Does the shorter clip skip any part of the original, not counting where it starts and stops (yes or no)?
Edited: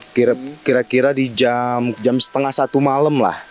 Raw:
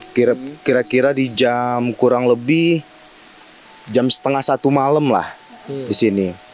yes